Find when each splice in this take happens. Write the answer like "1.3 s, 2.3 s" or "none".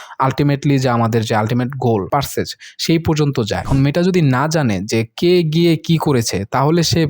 2.1 s, 3.7 s